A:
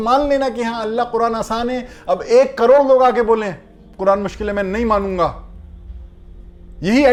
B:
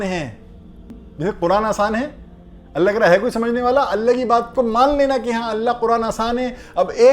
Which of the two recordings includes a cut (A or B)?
B